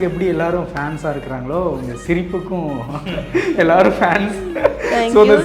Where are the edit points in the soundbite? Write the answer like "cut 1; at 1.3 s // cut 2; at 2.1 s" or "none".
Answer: none